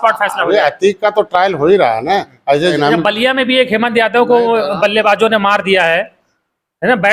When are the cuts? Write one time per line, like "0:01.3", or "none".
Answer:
0:02.7